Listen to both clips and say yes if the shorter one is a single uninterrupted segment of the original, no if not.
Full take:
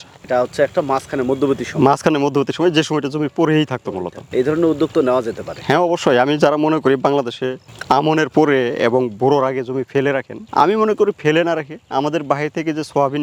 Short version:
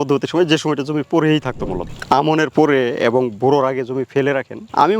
no